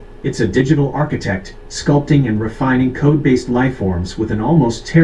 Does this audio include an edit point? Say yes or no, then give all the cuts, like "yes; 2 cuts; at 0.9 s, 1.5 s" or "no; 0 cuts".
no; 0 cuts